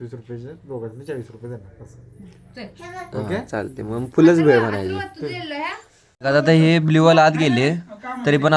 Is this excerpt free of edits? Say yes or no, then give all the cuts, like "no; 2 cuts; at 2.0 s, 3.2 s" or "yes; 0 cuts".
no; 1 cut; at 6.1 s